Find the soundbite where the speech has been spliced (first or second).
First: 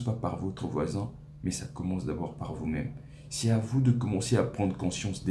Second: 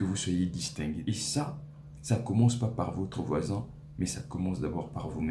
second